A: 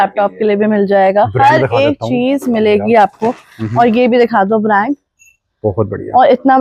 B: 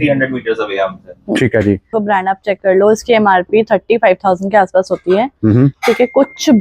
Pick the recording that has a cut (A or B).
B